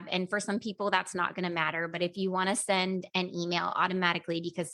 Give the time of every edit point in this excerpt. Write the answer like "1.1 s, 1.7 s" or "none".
none